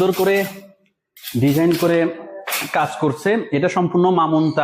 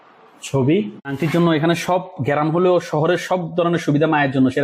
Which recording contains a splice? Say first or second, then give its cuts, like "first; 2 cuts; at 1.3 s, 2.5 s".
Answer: second; 1 cut; at 1.0 s